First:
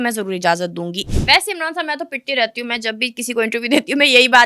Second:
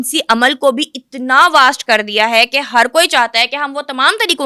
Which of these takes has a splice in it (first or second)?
first